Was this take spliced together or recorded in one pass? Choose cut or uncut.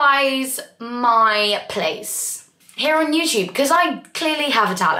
uncut